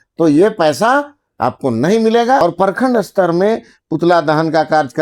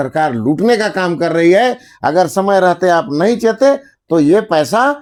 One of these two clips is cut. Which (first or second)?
first